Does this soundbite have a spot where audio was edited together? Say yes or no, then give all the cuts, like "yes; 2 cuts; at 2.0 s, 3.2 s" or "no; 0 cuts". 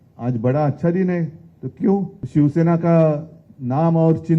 yes; 1 cut; at 2.2 s